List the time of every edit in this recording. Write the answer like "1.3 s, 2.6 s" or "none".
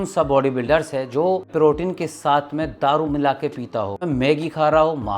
1.5 s, 4.0 s